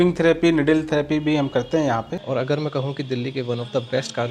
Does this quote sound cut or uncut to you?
cut